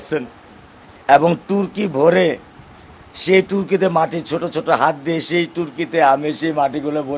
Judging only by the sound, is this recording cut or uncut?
uncut